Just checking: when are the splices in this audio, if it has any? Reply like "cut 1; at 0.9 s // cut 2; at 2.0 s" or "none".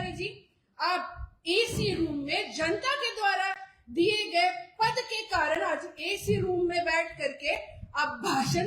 none